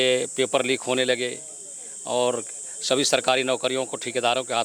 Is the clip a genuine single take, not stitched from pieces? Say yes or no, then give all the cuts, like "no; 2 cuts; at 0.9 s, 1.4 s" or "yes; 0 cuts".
yes; 0 cuts